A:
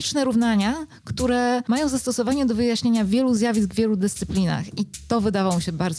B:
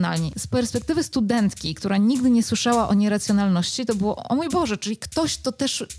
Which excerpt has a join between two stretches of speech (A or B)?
A